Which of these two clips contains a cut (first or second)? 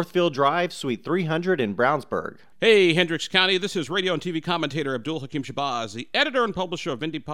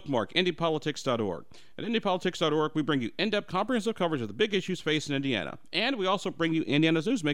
first